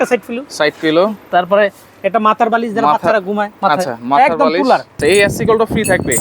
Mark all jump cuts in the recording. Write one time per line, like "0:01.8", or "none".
0:05.0